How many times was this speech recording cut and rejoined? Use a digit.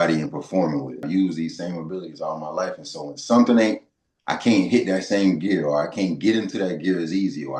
1